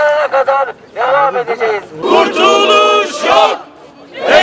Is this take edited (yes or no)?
yes